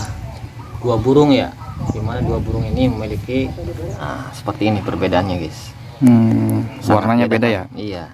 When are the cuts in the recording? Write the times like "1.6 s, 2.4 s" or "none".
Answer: 4.0 s